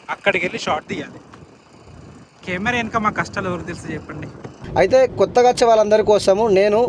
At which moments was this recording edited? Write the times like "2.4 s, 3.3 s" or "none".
4.6 s

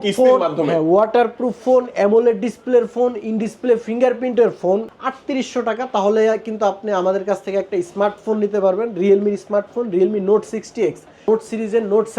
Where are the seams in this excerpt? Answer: 4.9 s, 11.3 s

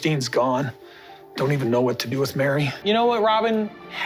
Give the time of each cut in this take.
2.7 s

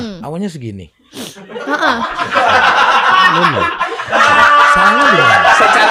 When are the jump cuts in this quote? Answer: none

